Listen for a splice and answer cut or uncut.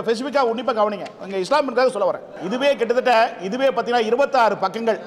cut